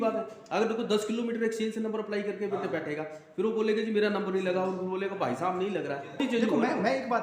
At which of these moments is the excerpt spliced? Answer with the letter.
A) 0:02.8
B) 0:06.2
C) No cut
B